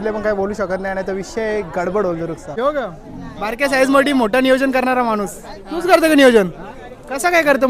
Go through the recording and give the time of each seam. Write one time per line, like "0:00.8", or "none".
0:02.5